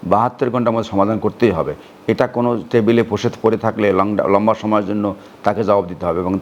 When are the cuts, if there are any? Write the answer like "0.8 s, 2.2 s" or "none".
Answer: none

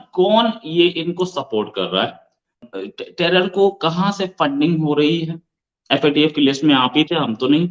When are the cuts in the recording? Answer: 2.6 s

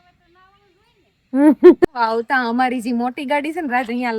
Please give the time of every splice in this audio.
1.8 s

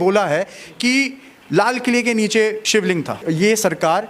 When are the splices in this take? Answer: 3.2 s

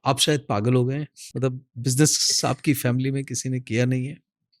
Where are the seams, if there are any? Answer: 1.2 s

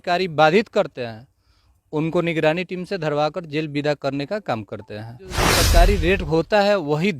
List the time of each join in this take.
5.5 s

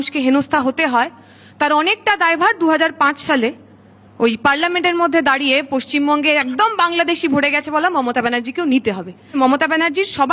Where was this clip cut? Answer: 9.3 s

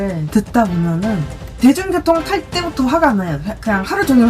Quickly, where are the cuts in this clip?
1.6 s

